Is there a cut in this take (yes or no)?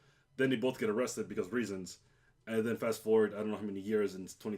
yes